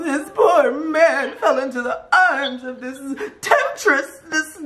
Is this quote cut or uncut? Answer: uncut